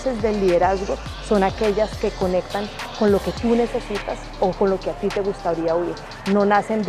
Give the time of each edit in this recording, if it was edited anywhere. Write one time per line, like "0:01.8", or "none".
none